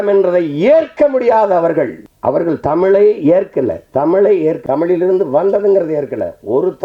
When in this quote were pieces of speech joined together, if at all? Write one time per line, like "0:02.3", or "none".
0:02.0
0:04.6